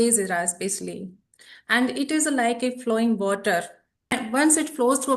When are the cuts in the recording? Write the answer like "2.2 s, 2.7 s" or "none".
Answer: none